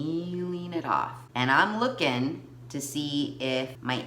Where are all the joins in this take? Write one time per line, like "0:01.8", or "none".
0:01.2